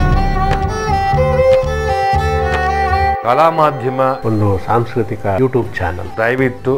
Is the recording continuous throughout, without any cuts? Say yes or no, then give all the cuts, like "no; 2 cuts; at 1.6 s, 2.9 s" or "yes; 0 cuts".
yes; 0 cuts